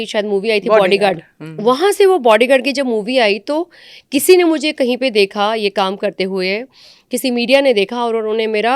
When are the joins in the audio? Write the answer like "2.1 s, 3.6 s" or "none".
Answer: none